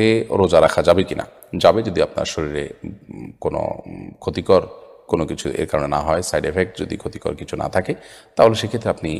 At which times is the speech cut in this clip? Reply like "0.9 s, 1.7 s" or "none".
none